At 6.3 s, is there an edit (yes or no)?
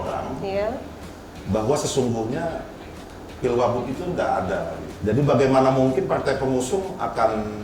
no